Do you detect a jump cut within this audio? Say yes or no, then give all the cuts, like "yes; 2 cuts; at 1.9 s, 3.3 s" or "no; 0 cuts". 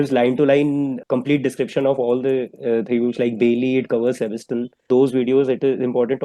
yes; 2 cuts; at 1.0 s, 4.9 s